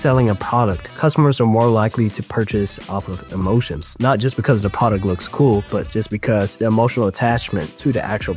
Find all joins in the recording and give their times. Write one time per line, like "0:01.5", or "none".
none